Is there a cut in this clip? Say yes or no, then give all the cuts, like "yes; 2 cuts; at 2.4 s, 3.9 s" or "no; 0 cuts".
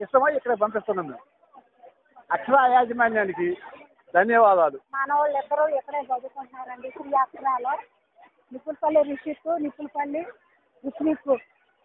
yes; 1 cut; at 5.0 s